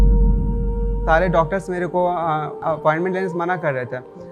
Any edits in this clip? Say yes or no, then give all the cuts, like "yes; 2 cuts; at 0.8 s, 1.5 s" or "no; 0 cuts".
yes; 2 cuts; at 1.0 s, 2.6 s